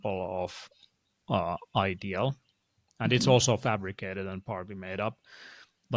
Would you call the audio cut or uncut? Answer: uncut